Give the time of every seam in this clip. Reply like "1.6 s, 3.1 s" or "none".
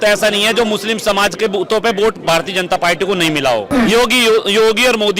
3.7 s